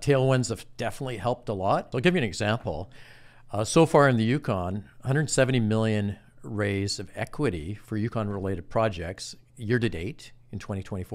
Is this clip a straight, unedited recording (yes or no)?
no